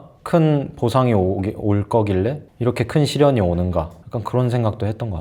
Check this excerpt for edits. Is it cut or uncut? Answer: uncut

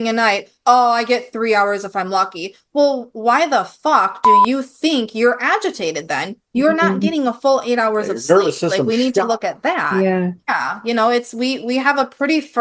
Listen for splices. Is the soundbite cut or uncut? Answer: uncut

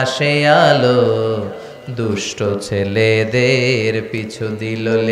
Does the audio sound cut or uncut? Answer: uncut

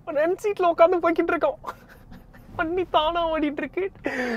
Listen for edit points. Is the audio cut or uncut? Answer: uncut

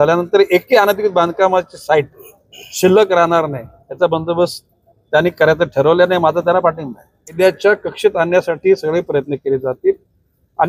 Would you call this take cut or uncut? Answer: cut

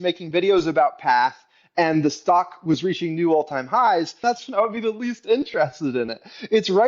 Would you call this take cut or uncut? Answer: cut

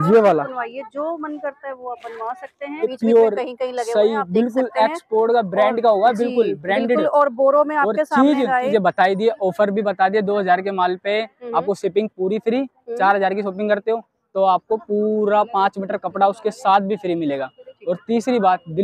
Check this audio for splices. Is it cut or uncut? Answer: cut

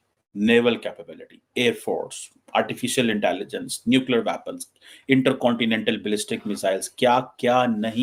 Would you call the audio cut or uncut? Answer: uncut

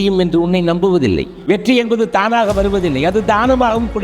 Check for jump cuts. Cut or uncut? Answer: cut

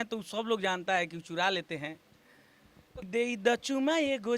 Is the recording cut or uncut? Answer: cut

